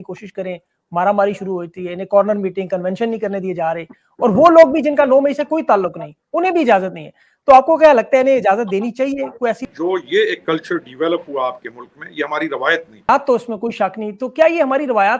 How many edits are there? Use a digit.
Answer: 2